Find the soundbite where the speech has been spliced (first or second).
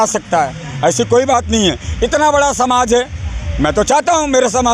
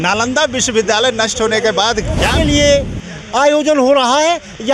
second